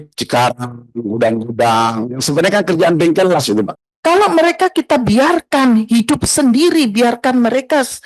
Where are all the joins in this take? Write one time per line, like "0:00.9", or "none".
0:03.8